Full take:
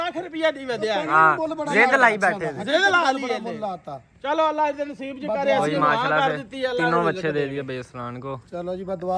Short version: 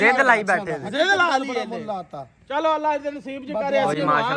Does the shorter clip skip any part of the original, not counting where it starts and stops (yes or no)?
no